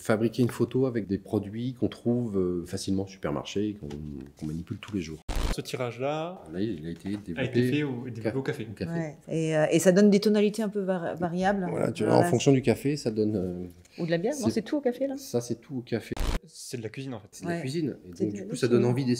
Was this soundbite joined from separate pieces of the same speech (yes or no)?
yes